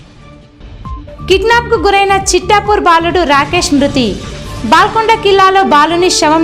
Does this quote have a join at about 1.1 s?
no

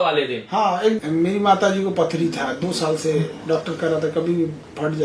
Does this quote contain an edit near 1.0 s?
yes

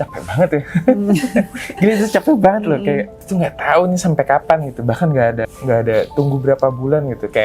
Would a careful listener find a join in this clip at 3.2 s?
yes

